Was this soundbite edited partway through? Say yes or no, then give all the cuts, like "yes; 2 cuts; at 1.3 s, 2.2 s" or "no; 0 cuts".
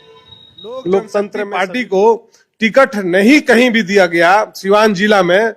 yes; 1 cut; at 1.4 s